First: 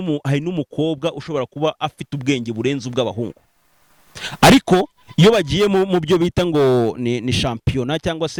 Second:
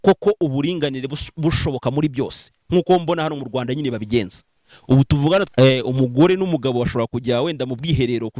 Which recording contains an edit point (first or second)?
second